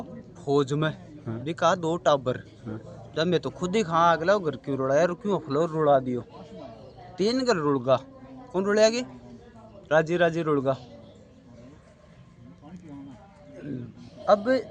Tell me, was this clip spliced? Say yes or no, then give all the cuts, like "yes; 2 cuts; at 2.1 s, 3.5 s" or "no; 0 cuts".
no; 0 cuts